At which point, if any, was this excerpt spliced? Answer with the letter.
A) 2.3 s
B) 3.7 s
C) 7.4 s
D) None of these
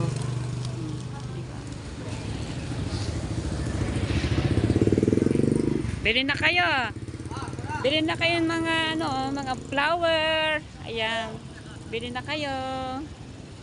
D